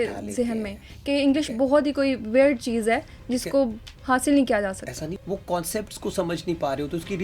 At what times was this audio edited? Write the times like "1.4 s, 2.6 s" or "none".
none